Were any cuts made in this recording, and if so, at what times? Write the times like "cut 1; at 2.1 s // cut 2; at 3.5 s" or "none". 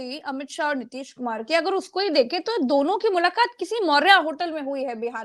none